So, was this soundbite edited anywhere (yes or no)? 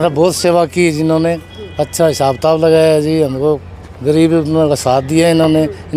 no